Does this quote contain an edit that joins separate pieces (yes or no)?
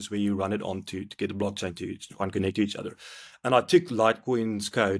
no